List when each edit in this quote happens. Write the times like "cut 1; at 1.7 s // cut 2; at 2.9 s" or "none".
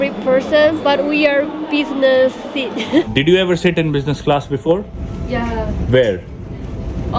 cut 1; at 3.1 s // cut 2; at 5.8 s